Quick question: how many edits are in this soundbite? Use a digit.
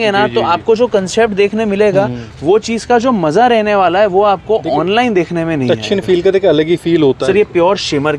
1